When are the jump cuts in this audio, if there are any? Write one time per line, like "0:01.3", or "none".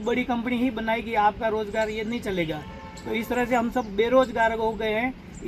none